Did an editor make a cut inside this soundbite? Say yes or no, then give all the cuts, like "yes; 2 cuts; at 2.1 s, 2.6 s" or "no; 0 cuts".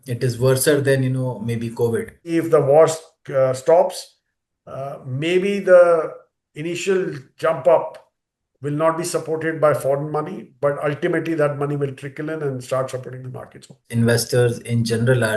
yes; 2 cuts; at 2.3 s, 13.8 s